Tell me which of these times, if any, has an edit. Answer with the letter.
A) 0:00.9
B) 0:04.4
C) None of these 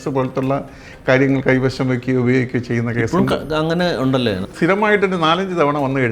B